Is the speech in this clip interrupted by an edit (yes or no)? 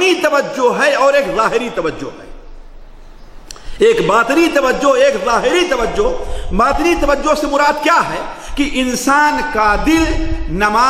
no